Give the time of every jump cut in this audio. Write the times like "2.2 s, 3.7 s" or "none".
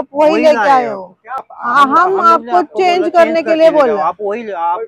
1.4 s